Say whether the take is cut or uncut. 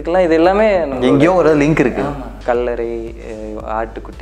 cut